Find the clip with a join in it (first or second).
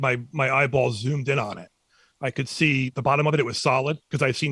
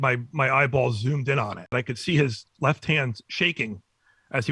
second